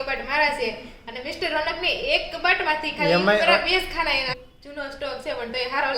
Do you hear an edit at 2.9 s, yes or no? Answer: no